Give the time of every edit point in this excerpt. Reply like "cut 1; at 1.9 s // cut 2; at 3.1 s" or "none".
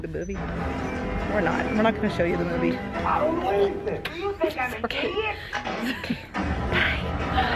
none